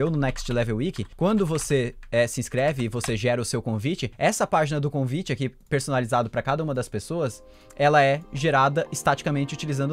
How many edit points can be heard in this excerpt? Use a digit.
2